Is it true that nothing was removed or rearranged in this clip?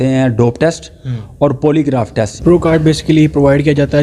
no; 1 cut; at 2.2 s

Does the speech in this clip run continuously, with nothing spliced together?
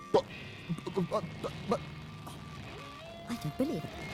yes; 0 cuts

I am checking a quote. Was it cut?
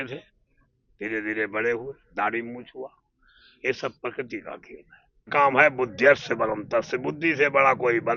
yes; 1 cut; at 5.3 s

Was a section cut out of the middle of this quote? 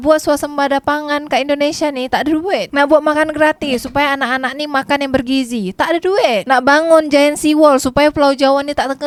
no; 0 cuts

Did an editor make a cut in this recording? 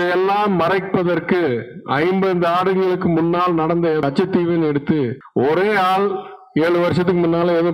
yes; 1 cut; at 5.2 s

